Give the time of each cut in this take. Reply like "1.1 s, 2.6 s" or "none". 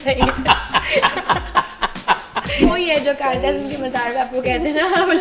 2.6 s